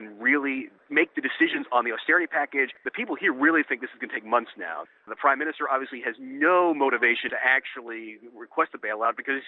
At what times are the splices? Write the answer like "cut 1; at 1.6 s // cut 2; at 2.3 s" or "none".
cut 1; at 2.8 s // cut 2; at 4.8 s // cut 3; at 7.3 s